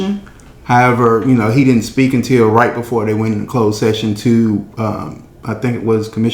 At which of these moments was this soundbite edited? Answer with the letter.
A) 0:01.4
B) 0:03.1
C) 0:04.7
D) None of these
D